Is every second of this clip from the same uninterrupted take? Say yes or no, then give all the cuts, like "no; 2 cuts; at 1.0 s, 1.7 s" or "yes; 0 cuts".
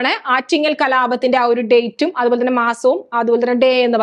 yes; 0 cuts